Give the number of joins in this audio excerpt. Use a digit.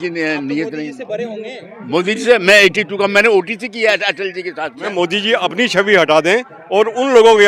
1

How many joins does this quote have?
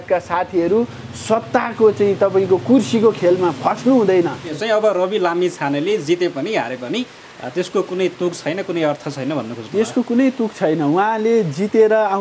1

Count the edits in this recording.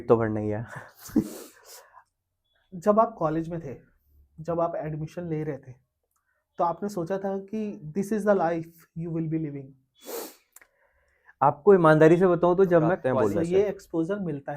1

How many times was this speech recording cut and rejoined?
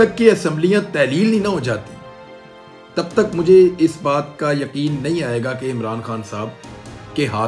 0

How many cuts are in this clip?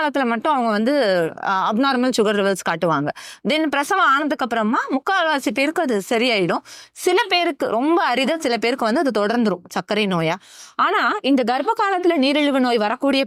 0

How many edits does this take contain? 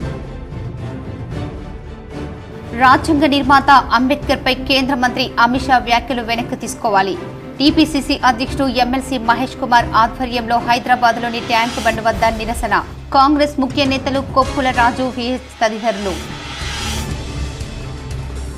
1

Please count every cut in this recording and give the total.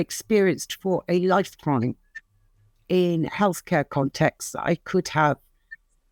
0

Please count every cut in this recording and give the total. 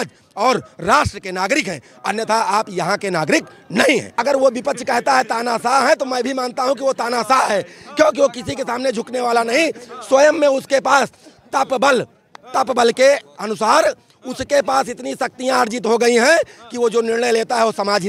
1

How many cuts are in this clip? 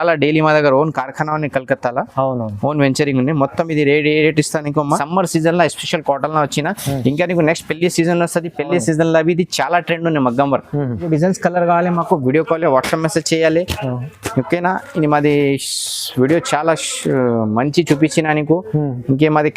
2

